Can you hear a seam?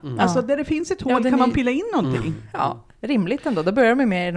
no; 0 cuts

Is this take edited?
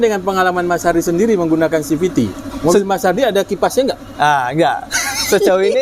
no; 0 cuts

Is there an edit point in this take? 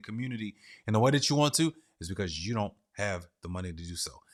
no; 0 cuts

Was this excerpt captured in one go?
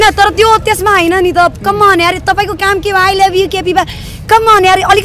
yes; 0 cuts

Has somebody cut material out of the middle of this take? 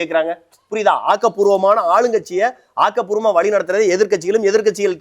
no; 0 cuts

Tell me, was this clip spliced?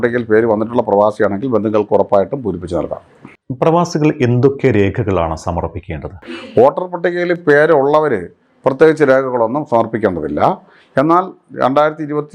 no; 0 cuts

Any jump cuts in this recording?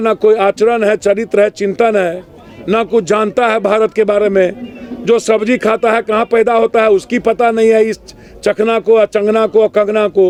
no; 0 cuts

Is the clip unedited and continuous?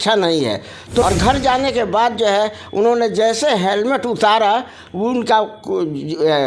no; 1 cut; at 1.0 s

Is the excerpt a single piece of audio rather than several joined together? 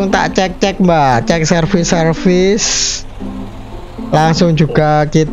yes; 0 cuts

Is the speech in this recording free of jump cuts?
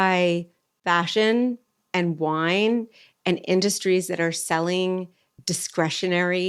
yes; 0 cuts

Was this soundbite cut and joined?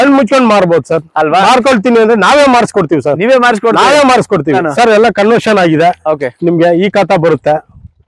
yes; 1 cut; at 4.5 s

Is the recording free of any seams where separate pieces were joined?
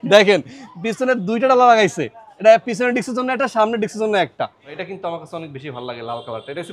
no; 1 cut; at 4.7 s

